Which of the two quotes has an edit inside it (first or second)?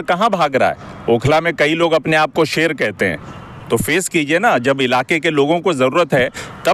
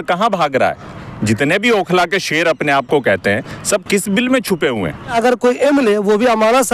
second